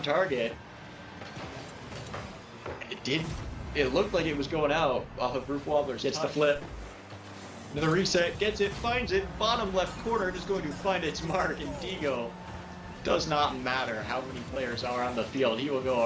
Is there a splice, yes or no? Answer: yes